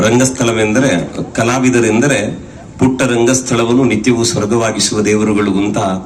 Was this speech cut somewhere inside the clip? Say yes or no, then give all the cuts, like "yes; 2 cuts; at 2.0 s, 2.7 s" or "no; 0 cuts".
no; 0 cuts